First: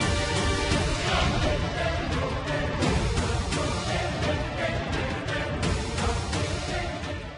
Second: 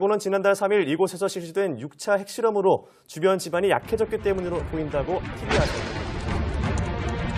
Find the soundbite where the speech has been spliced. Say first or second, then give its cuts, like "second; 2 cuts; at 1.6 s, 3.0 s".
first; 1 cut; at 5.9 s